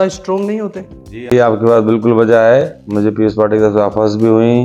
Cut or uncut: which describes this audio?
uncut